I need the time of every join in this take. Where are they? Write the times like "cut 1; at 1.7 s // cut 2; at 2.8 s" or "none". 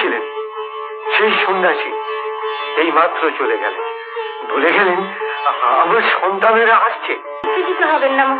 cut 1; at 7.4 s